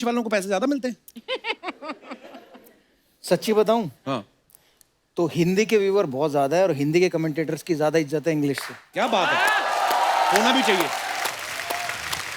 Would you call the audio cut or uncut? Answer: uncut